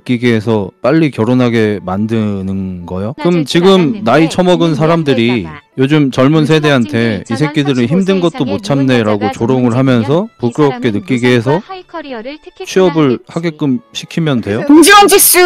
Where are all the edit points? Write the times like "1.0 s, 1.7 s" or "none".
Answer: 3.1 s, 14.6 s